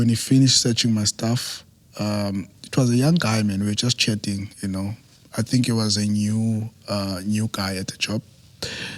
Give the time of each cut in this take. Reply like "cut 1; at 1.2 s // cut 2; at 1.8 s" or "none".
none